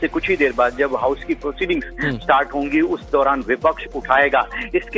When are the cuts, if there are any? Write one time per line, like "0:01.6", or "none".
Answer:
0:02.9